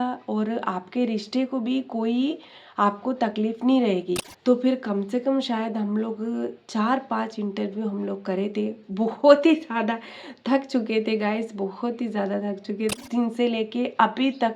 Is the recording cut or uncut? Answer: cut